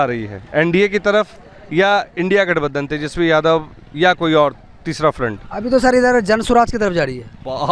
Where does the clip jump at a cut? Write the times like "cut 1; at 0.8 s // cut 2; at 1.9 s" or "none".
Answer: none